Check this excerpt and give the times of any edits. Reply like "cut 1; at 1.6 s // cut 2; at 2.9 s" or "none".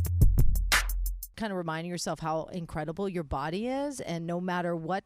cut 1; at 1.3 s